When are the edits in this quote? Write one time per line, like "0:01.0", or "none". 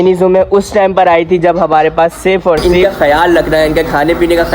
0:02.7